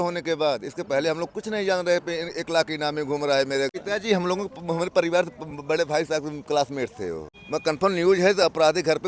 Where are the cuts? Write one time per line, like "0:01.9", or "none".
0:03.7
0:07.3